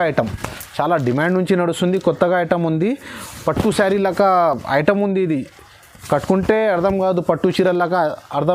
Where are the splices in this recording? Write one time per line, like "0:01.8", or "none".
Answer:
none